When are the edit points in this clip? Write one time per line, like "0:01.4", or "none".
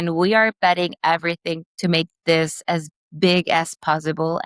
0:01.8